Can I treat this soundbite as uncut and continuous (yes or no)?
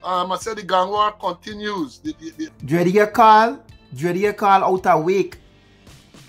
no